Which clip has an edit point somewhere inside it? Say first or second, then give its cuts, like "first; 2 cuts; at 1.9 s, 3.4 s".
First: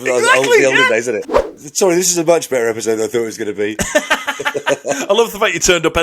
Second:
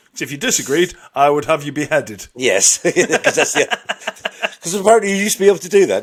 first; 1 cut; at 1.5 s